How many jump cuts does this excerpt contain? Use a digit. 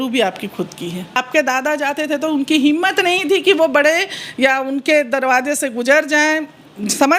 1